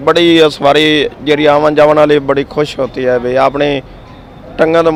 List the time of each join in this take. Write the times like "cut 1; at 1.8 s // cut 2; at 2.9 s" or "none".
none